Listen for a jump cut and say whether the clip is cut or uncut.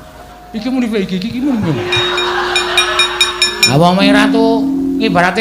cut